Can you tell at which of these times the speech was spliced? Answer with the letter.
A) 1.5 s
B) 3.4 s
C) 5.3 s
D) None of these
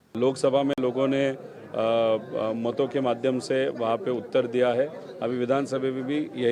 D